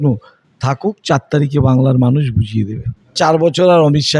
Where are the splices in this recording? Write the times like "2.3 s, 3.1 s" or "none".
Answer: 3.1 s